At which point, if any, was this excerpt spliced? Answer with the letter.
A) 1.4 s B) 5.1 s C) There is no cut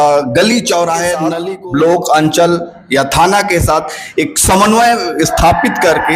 A